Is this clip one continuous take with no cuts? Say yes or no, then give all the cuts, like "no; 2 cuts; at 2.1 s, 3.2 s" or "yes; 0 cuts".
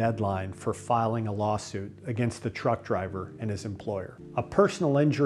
no; 1 cut; at 4.2 s